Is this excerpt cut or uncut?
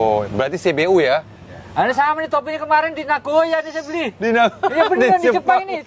uncut